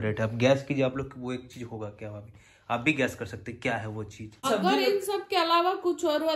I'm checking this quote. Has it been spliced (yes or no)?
yes